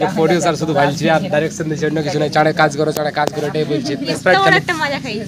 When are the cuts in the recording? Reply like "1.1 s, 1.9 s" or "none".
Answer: 4.2 s